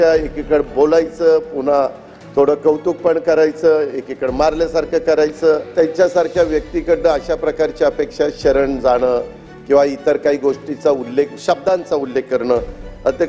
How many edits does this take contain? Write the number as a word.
one